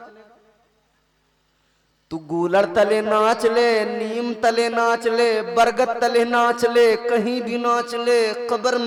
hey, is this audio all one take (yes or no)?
yes